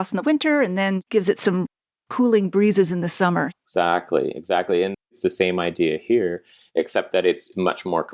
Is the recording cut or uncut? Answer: cut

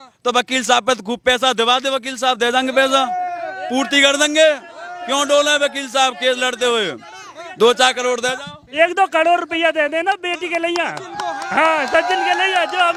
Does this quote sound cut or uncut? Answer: uncut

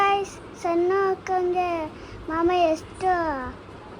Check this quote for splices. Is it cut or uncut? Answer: uncut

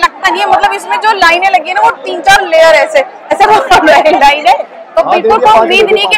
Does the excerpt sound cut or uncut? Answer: uncut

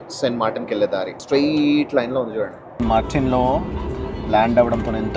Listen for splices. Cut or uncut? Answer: cut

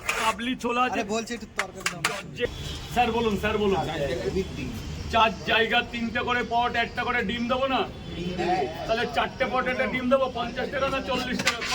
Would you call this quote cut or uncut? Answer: cut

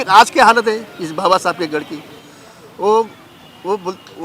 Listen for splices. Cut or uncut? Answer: uncut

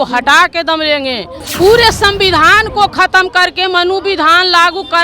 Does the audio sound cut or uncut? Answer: cut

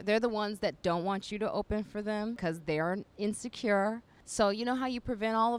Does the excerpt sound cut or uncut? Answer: cut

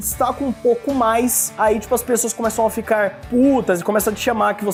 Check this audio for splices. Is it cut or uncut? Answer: uncut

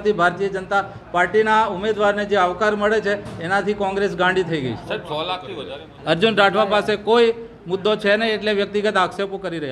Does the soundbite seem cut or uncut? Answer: cut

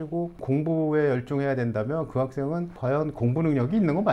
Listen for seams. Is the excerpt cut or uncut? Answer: uncut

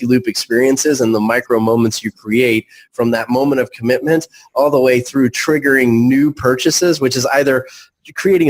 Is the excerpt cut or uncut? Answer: uncut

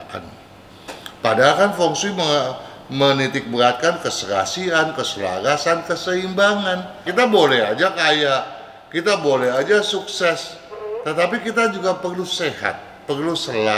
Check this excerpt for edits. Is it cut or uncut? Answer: cut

